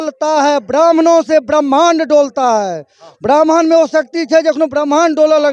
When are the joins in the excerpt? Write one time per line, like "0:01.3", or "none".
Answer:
none